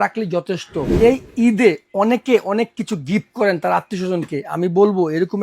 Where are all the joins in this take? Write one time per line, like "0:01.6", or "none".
0:00.9

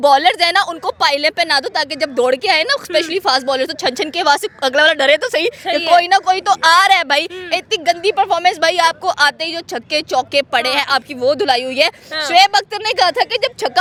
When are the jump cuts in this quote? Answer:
none

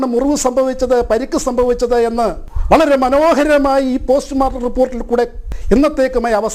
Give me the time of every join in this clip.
0:02.5
0:05.5

